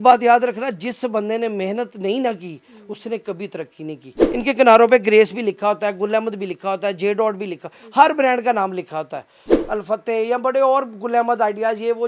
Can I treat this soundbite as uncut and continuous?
no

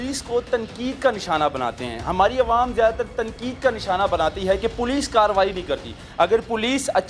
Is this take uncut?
no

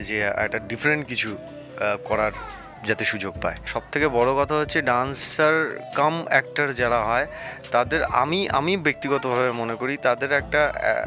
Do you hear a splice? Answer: yes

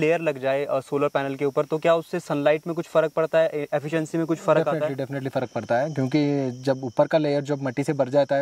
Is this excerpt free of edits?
yes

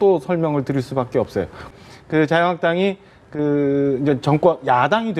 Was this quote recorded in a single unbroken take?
no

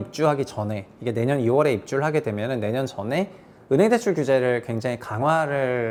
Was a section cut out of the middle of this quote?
no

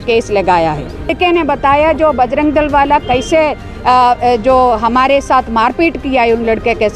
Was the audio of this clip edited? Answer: yes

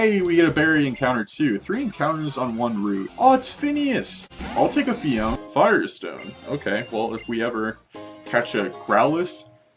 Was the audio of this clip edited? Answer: yes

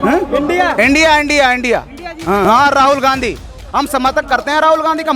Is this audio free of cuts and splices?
no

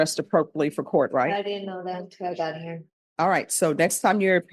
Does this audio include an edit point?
no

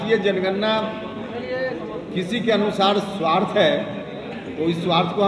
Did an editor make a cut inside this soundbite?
no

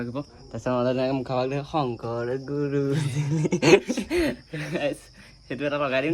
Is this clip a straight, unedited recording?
yes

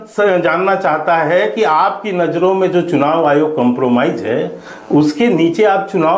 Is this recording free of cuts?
yes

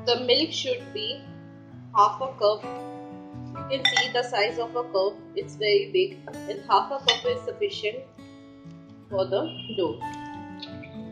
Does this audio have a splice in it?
yes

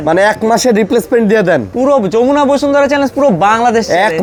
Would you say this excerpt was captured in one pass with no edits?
yes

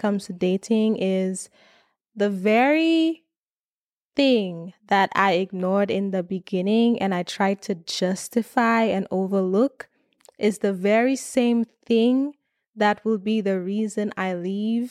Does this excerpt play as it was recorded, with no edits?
yes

